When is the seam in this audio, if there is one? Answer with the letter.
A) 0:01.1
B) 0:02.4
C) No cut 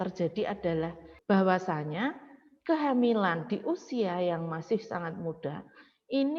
A